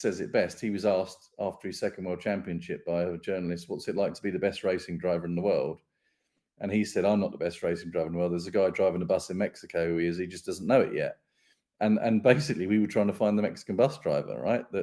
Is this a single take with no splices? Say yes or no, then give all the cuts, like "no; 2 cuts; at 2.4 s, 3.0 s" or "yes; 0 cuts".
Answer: yes; 0 cuts